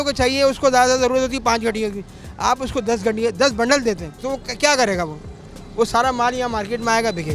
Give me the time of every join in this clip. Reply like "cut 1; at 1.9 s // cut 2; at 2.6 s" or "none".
cut 1; at 4.2 s